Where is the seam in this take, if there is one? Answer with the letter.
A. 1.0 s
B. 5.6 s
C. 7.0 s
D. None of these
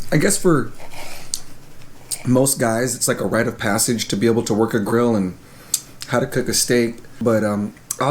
C